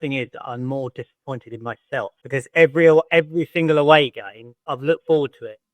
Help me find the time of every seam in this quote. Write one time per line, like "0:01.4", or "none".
0:02.2
0:04.7